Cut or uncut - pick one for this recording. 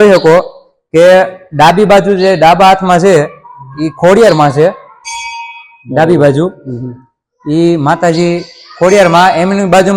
uncut